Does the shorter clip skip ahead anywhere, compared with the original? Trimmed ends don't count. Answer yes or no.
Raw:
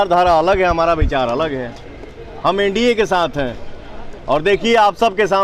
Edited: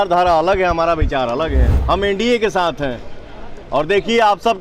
yes